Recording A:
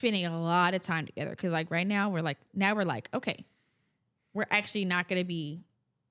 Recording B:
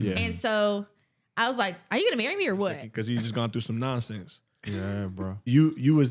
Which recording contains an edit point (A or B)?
B